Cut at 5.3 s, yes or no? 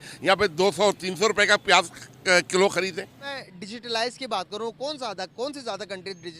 no